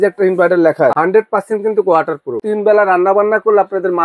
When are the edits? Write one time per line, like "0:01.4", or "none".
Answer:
0:01.0
0:02.4